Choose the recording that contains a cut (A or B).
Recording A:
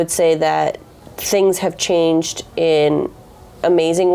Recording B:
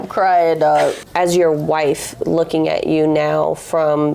B